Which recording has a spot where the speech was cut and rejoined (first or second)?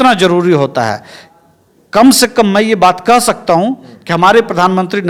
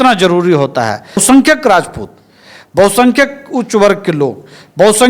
second